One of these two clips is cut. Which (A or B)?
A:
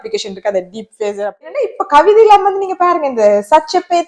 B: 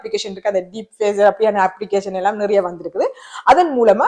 A